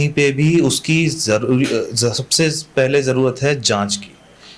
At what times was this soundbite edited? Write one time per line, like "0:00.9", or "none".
none